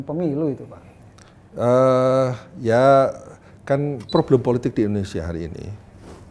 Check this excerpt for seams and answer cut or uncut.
cut